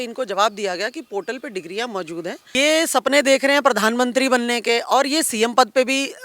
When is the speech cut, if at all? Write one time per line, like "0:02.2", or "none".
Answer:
0:02.4